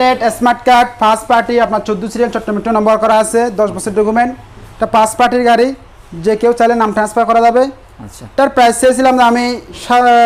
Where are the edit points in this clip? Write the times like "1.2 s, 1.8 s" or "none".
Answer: none